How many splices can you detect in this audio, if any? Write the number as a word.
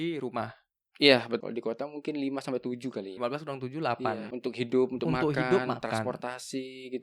three